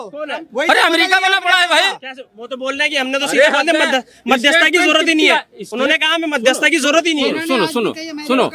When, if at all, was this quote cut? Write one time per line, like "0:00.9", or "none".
none